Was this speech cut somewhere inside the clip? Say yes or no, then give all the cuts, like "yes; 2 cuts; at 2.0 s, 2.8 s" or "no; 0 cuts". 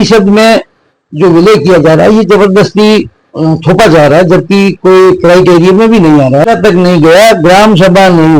yes; 1 cut; at 6.4 s